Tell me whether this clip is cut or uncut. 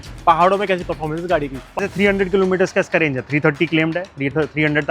cut